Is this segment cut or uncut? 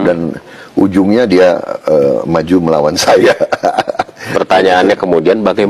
uncut